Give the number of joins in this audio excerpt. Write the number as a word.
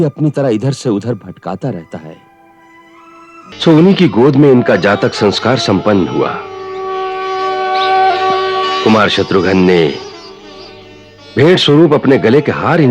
one